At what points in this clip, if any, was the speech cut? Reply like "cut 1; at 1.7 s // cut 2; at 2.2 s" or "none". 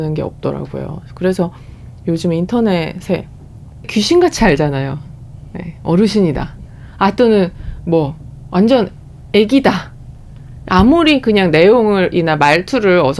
none